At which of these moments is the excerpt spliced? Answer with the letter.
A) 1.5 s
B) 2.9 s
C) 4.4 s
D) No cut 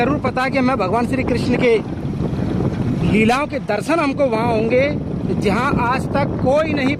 D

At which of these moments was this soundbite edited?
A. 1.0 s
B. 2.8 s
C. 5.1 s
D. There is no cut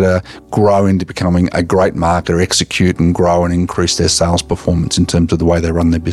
D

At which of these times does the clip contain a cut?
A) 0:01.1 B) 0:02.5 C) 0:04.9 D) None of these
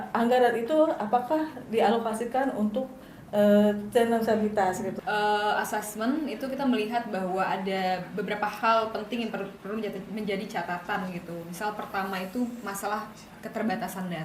C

